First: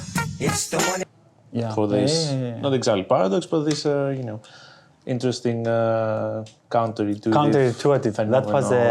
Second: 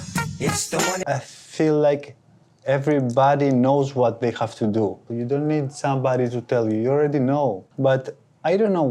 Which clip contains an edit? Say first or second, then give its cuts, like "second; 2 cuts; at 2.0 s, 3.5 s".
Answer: second; 3 cuts; at 1.0 s, 5.1 s, 7.7 s